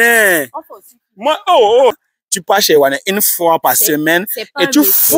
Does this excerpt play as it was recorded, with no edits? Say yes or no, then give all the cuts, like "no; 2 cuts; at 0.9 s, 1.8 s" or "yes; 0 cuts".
no; 1 cut; at 1.9 s